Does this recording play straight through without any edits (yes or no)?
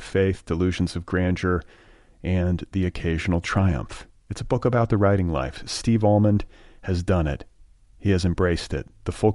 yes